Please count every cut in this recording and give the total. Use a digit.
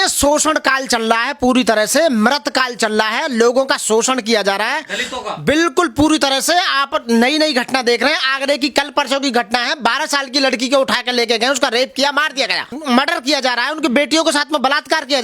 1